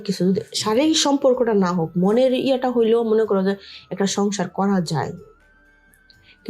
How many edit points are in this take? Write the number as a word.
zero